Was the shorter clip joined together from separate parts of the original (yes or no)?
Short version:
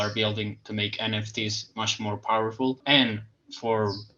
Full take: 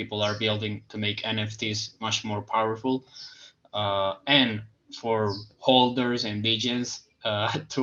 yes